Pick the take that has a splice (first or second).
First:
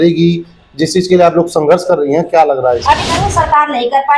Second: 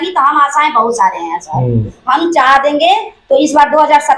first